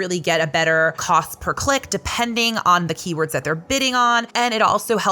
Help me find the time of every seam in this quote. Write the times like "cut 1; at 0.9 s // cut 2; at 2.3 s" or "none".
cut 1; at 1.0 s // cut 2; at 4.3 s